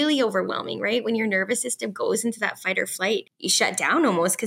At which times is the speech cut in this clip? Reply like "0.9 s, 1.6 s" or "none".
3.3 s